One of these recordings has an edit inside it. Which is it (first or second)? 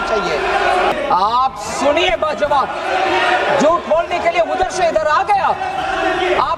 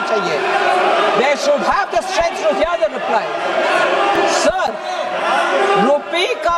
first